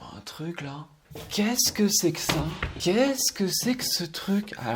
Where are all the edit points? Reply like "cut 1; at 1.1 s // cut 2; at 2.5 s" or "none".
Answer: cut 1; at 1.0 s // cut 2; at 2.7 s